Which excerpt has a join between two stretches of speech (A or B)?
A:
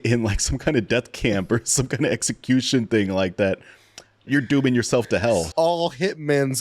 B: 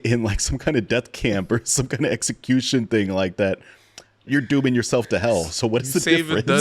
A